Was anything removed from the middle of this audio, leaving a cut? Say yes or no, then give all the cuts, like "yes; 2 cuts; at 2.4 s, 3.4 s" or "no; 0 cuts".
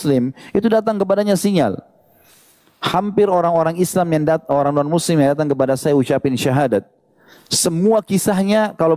no; 0 cuts